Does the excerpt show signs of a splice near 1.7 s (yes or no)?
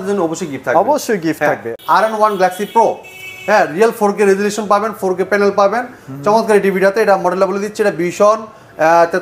yes